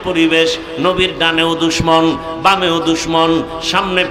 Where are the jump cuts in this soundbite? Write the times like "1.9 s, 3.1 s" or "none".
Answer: none